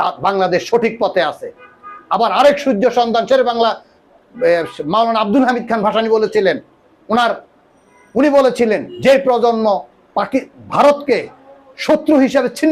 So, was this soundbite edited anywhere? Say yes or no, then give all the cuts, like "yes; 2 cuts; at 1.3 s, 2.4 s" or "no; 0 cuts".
no; 0 cuts